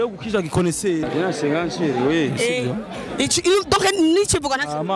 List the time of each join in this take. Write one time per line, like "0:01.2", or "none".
0:01.0